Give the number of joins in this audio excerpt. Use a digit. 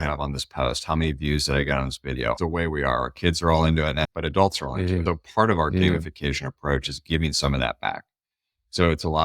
1